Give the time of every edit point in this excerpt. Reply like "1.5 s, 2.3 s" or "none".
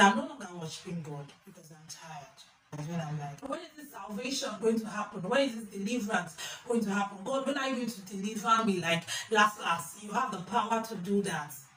none